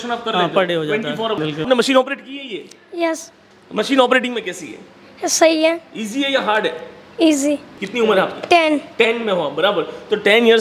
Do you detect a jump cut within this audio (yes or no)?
yes